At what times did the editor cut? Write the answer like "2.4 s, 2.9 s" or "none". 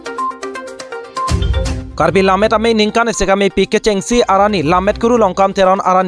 1.8 s